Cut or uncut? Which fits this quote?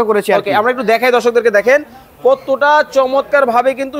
uncut